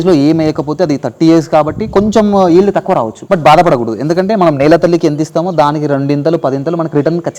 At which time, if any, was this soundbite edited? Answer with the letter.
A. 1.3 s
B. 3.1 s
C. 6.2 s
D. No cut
B